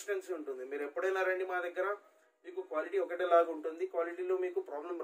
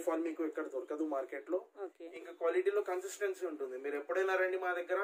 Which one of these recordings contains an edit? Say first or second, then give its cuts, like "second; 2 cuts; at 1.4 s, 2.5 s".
second; 1 cut; at 2.0 s